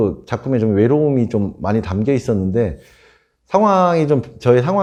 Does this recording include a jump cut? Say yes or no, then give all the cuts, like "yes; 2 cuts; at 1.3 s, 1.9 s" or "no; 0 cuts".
no; 0 cuts